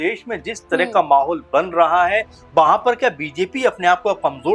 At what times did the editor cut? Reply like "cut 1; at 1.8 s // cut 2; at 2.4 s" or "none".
none